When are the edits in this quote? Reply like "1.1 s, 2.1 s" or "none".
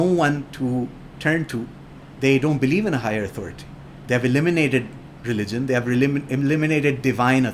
none